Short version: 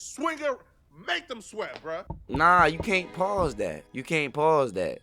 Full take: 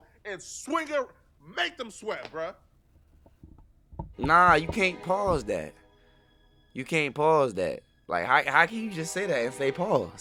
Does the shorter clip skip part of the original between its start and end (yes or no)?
yes